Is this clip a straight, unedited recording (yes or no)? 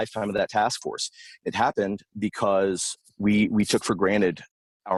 yes